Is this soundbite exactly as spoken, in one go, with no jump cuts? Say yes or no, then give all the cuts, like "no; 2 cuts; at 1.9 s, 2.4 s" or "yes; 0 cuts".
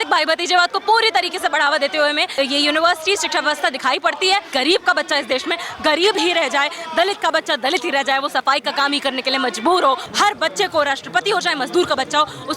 no; 3 cuts; at 2.3 s, 4.5 s, 10.1 s